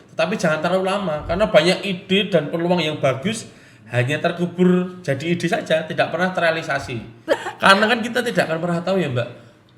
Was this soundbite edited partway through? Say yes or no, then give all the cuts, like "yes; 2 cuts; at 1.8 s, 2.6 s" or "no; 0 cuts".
yes; 1 cut; at 7.4 s